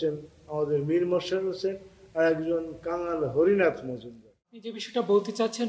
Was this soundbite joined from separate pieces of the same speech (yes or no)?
yes